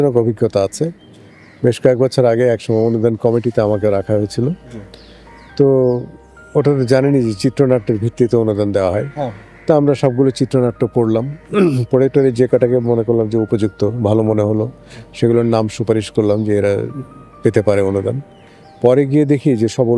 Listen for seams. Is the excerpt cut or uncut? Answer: uncut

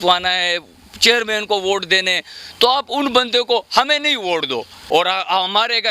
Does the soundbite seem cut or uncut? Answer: cut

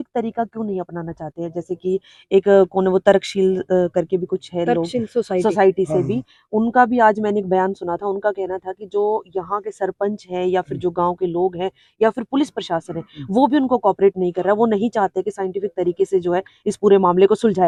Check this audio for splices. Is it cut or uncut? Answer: uncut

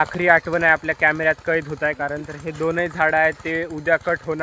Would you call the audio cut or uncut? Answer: uncut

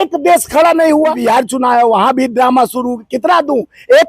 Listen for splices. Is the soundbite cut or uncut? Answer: cut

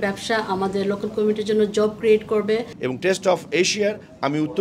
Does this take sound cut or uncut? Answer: cut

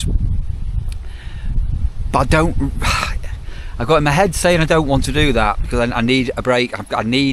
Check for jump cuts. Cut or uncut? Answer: uncut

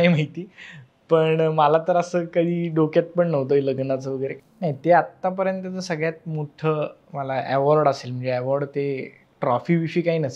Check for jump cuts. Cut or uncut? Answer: cut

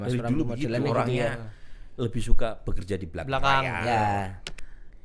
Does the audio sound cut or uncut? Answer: uncut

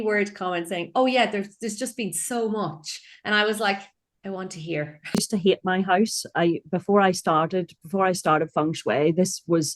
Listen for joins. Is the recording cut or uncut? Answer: cut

